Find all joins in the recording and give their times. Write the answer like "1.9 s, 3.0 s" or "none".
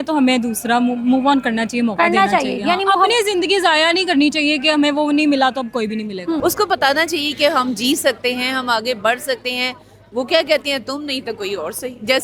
6.4 s